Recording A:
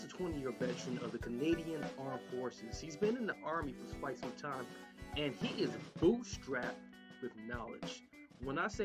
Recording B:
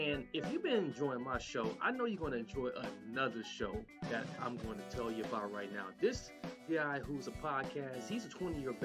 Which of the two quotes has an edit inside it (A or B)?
B